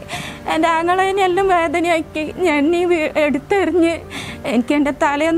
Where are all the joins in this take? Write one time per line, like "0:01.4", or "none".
none